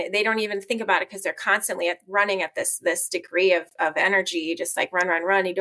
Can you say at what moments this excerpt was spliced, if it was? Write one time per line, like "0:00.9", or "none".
none

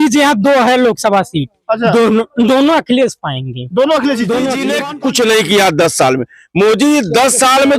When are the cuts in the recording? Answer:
0:04.7

